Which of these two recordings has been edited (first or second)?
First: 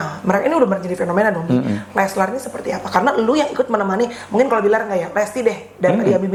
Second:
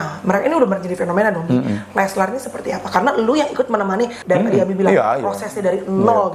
second